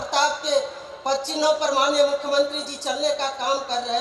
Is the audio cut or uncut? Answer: uncut